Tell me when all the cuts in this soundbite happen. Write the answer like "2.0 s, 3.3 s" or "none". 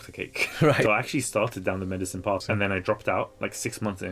0.8 s, 2.4 s